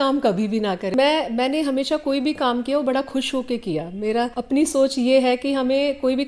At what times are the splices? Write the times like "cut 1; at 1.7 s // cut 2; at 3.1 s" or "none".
cut 1; at 0.9 s // cut 2; at 4.4 s